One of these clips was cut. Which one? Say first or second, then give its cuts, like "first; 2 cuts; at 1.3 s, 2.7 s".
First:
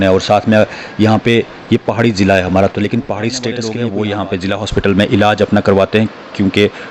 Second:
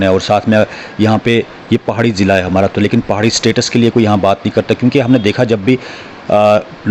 first; 1 cut; at 3.6 s